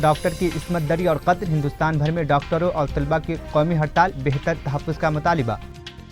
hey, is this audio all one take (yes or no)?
yes